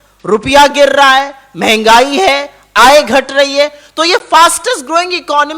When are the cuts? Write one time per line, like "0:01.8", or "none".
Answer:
none